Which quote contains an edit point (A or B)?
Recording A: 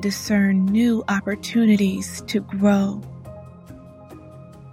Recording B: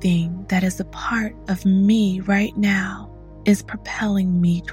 A